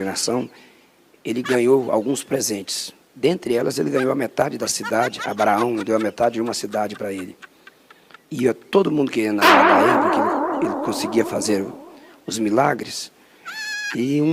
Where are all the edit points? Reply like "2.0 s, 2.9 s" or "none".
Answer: none